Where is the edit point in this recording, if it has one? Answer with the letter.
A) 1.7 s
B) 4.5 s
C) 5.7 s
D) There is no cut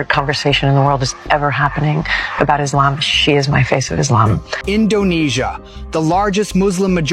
B